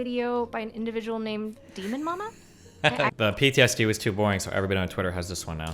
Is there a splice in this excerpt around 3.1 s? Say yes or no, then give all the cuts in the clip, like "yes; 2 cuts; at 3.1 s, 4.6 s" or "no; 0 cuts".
yes; 1 cut; at 3.1 s